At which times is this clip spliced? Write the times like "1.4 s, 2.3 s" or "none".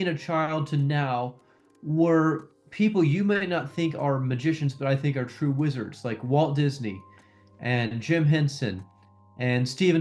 none